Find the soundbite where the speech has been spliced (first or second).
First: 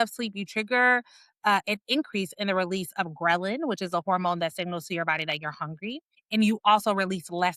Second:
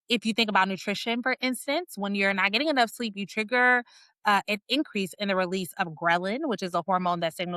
first